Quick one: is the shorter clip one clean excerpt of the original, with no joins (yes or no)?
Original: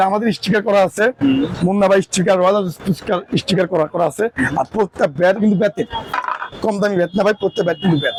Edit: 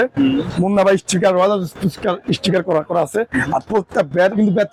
yes